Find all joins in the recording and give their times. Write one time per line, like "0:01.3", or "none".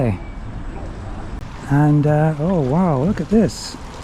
0:01.4